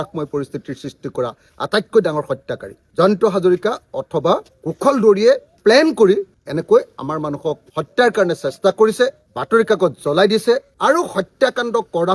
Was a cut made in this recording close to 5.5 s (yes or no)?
yes